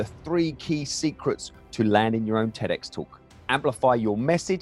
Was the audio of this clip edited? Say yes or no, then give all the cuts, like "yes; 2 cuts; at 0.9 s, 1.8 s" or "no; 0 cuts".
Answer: yes; 1 cut; at 3.5 s